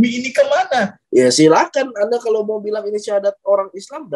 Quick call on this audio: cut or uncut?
cut